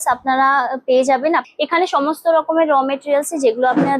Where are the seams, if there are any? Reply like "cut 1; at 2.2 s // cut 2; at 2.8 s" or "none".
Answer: cut 1; at 1.5 s